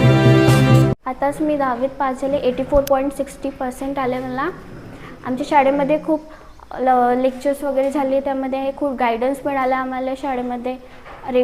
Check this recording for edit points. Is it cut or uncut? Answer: cut